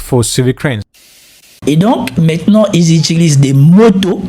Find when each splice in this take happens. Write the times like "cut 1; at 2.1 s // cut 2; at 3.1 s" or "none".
cut 1; at 1.2 s